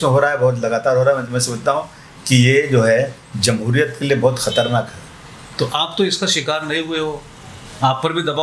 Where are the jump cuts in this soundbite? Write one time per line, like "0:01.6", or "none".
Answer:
none